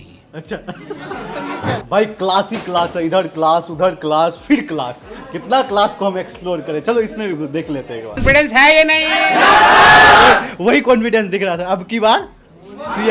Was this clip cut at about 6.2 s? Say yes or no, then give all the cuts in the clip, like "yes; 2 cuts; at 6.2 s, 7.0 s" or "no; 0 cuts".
no; 2 cuts; at 1.8 s, 8.2 s